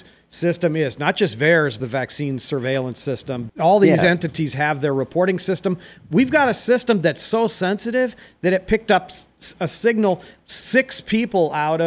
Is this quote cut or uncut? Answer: uncut